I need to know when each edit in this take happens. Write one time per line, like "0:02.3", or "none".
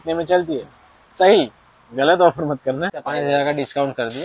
0:03.0